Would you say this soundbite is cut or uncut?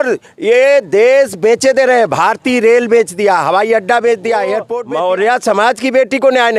cut